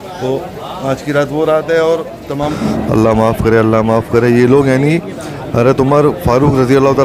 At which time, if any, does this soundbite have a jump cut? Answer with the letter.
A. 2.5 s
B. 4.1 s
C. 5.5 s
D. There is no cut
A